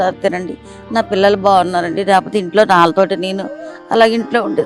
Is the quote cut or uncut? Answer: uncut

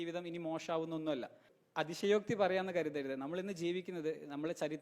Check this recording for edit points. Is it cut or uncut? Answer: cut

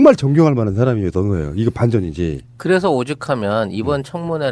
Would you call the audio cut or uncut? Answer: cut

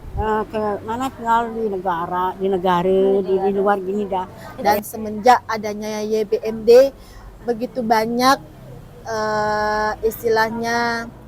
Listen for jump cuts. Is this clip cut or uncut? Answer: cut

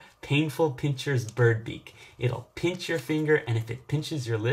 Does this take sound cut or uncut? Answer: uncut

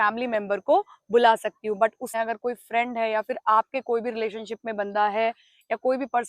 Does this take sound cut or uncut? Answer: cut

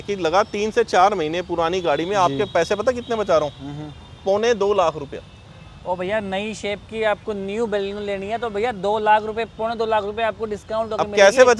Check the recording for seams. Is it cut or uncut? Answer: uncut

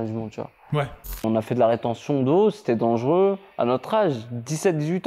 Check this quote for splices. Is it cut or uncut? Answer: cut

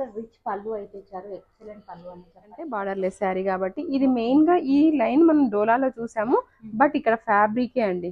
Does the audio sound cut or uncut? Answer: cut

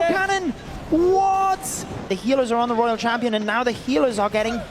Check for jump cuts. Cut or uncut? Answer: cut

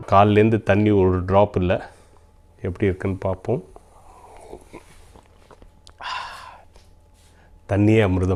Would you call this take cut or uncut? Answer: uncut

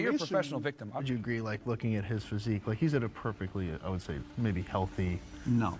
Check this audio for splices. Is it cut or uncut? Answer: cut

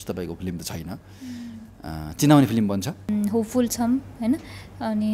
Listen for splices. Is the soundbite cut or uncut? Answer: cut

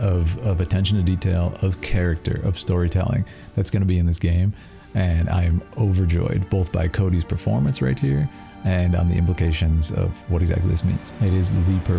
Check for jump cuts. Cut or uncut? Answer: cut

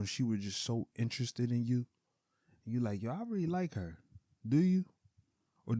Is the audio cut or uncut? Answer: uncut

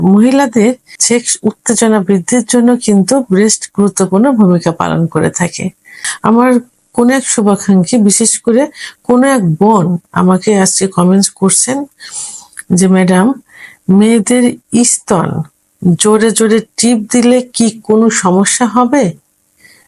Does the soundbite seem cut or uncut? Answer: cut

